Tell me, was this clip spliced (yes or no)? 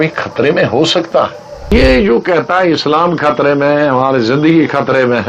yes